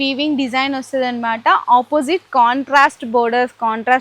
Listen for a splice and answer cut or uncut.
uncut